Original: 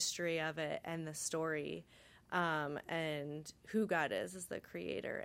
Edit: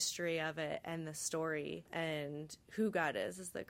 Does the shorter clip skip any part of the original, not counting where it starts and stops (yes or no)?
yes